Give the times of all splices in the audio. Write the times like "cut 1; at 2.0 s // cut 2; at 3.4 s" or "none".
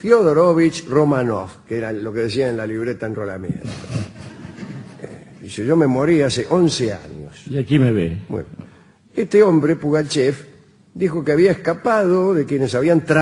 none